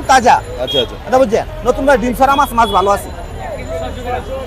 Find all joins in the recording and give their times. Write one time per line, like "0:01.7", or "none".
none